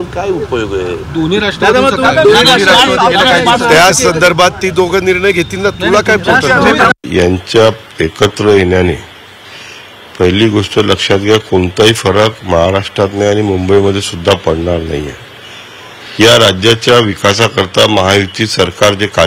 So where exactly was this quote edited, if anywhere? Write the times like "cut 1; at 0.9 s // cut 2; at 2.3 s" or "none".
none